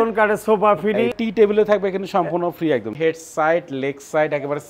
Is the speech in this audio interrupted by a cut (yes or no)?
yes